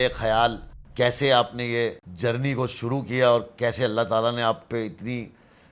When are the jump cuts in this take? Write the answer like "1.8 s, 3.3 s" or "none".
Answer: none